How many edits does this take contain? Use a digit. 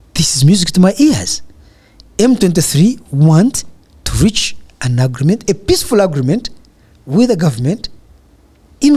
0